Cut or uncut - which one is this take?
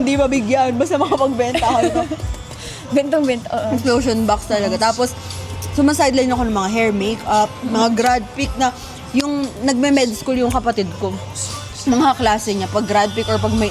uncut